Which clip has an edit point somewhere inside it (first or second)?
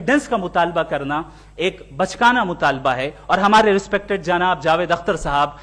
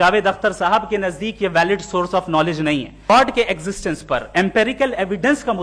second